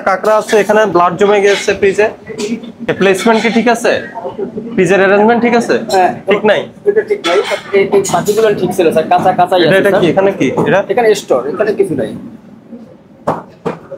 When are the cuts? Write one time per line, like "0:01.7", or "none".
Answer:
none